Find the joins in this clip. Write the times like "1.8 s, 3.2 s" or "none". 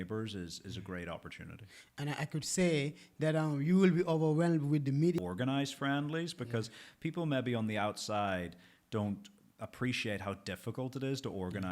5.2 s